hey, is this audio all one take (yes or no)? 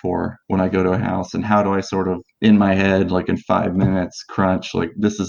yes